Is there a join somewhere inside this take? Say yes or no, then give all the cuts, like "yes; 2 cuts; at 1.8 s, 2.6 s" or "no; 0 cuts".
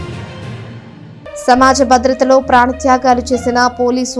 yes; 1 cut; at 1.4 s